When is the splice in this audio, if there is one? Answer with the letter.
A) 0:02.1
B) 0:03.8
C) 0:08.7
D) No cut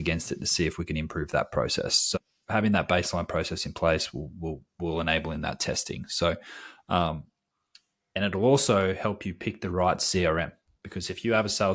A